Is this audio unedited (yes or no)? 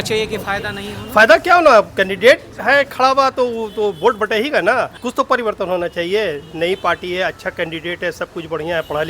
no